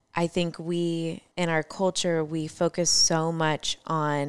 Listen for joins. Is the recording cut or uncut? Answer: cut